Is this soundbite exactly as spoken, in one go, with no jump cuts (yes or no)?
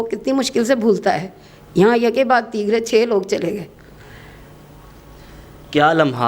yes